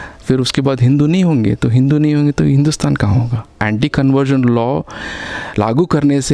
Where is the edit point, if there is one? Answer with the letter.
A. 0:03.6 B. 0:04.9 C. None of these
A